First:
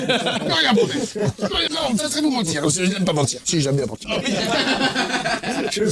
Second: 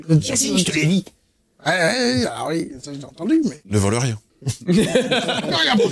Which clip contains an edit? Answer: second; 1 cut; at 3.6 s

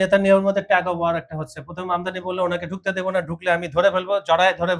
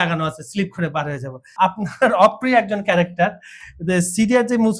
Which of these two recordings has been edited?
second; 1 cut; at 1.4 s

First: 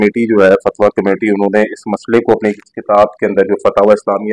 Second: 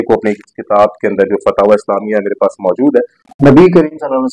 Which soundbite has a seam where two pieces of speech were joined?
second; 1 cut; at 3.2 s

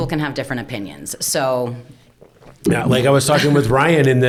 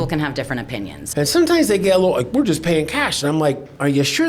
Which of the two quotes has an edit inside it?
second; 1 cut; at 1.0 s

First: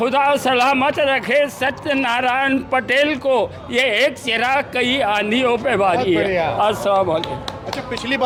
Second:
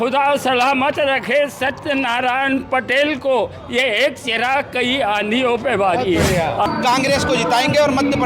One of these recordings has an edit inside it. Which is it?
second; 1 cut; at 6.7 s

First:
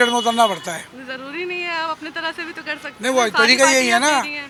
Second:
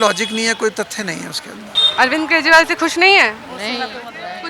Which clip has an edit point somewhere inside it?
second; 1 cut; at 1.8 s

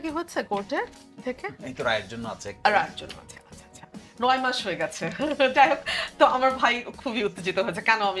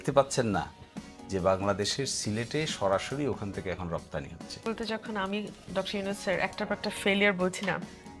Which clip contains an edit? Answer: second; 1 cut; at 4.6 s

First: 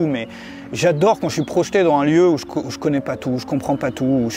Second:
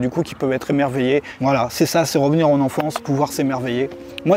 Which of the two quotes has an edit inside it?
second; 1 cut; at 1.3 s

